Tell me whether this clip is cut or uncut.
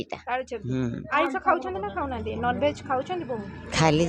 cut